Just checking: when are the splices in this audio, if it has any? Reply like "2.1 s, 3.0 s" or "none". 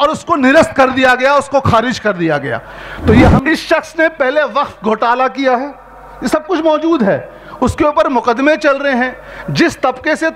3.4 s

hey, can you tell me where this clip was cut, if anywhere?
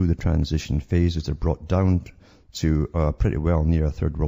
2.1 s

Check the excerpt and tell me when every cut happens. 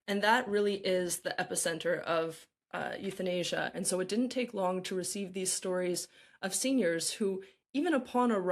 3.8 s

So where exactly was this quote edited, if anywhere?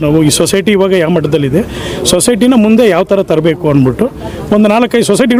none

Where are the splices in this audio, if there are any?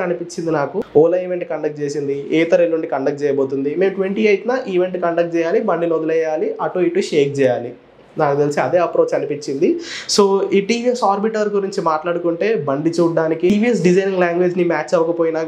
none

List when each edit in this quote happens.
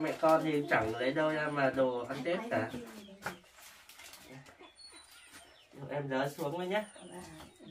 none

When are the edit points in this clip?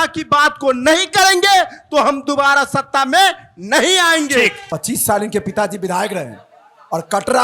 4.6 s

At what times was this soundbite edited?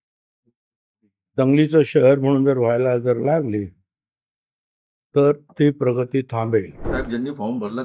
6.9 s

